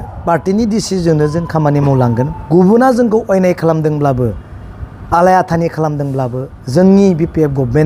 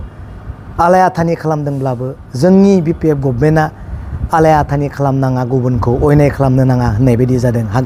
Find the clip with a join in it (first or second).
first